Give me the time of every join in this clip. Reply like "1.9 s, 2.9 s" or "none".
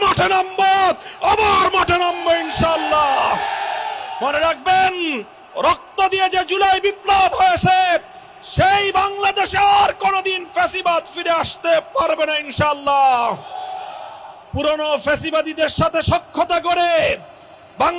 4.1 s